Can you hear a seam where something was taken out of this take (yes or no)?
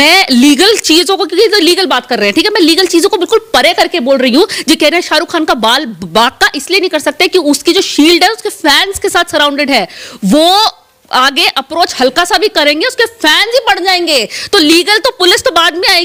no